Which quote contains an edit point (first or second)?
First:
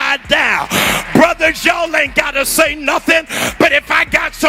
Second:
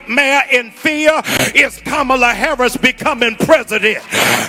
first